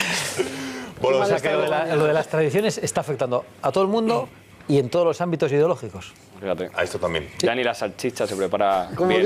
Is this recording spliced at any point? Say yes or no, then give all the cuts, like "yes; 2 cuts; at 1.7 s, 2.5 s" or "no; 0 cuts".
no; 0 cuts